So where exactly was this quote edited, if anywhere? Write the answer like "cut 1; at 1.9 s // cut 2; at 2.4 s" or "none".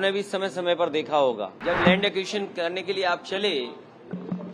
cut 1; at 1.5 s